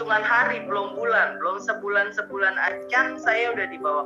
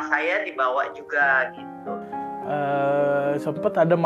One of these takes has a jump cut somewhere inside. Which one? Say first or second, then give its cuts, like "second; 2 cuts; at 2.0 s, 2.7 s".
second; 1 cut; at 2.1 s